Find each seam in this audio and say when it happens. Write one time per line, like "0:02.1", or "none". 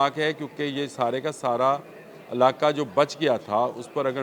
none